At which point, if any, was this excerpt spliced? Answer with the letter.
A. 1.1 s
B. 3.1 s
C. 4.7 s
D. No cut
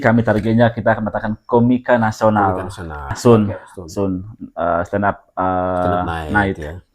B